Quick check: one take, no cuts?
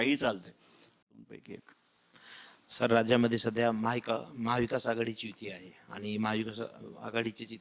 no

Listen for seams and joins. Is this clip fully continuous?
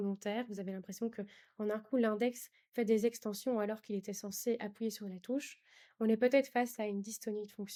yes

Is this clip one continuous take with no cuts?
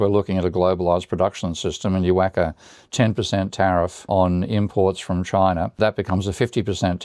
no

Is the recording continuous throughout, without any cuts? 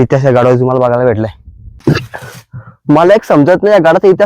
no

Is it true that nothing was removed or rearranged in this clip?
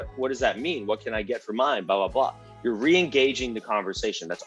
yes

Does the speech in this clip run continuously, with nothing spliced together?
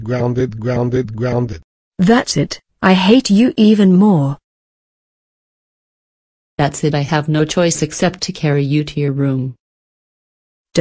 no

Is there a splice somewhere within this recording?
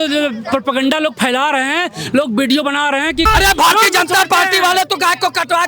yes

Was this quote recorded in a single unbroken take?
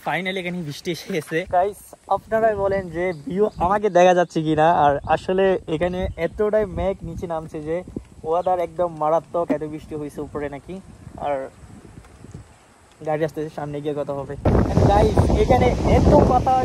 no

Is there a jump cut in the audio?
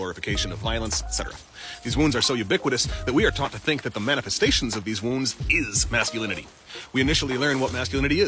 no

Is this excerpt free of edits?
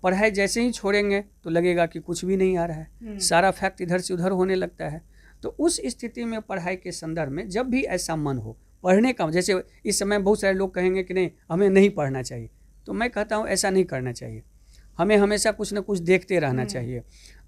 yes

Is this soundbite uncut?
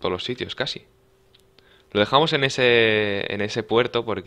no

